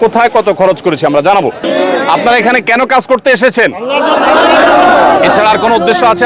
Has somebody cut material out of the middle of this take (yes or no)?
yes